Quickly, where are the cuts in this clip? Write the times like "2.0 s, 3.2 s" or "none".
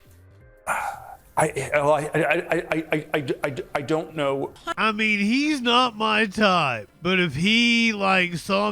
4.7 s, 6.9 s